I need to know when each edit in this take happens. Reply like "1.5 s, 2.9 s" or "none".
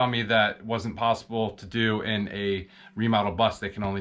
none